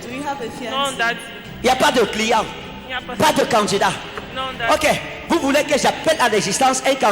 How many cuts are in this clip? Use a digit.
0